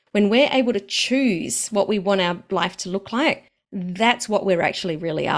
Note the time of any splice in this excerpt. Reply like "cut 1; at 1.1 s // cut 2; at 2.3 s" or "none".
none